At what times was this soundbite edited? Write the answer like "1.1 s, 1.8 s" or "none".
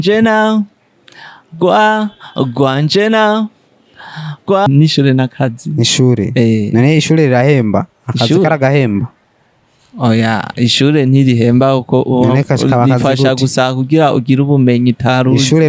4.7 s